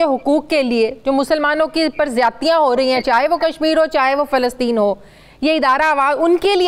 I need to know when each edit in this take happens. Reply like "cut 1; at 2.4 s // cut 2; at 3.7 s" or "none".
none

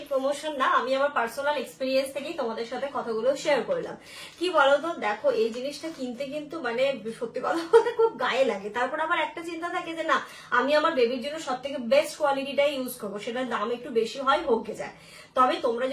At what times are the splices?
none

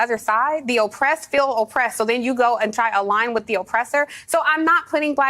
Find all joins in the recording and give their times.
cut 1; at 4.2 s

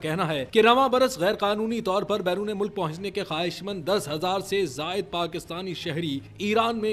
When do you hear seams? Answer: none

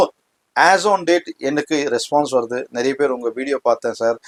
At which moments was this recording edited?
none

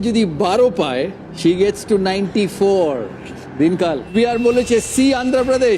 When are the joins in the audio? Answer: cut 1; at 4.1 s

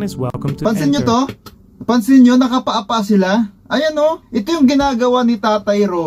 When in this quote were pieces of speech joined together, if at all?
none

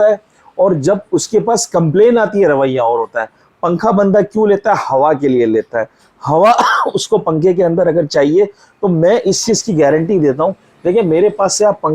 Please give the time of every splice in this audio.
none

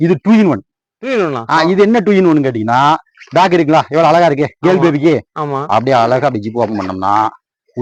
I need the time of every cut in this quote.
none

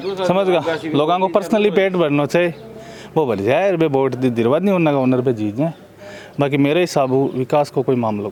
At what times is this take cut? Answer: none

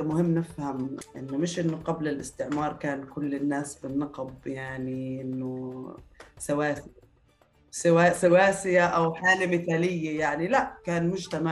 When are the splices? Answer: cut 1; at 1.0 s

